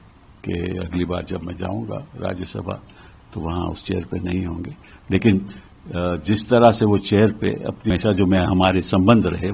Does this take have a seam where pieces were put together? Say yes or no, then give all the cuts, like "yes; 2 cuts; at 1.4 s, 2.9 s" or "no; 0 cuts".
yes; 1 cut; at 7.9 s